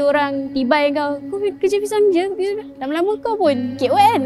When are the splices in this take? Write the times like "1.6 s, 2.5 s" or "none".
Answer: none